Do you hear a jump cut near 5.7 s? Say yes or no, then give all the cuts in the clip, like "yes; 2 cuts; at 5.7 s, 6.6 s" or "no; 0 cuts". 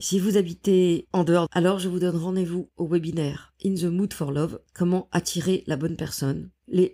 no; 1 cut; at 1.5 s